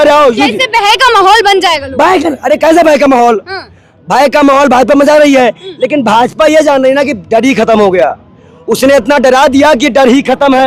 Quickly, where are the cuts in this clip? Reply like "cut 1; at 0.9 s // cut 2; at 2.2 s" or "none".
none